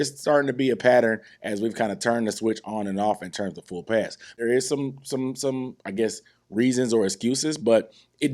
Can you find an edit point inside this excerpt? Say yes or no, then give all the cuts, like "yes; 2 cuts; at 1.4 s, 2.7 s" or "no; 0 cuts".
yes; 1 cut; at 4.4 s